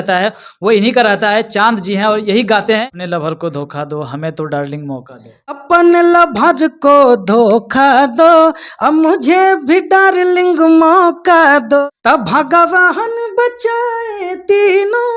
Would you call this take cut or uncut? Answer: cut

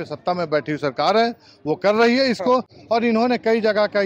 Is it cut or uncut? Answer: uncut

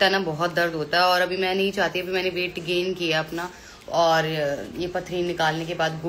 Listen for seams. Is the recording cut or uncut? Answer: uncut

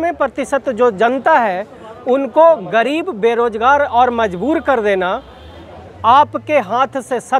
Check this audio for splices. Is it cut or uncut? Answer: uncut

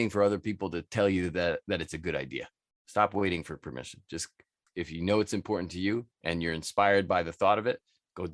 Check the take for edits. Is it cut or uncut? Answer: cut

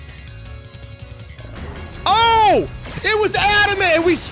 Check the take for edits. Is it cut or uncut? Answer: uncut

